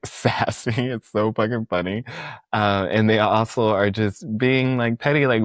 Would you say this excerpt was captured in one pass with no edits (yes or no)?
yes